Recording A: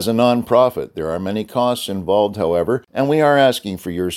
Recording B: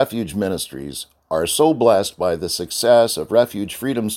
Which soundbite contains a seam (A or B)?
A